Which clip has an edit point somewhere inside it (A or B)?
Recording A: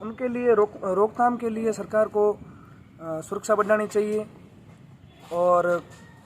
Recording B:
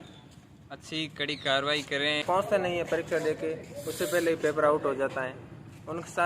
B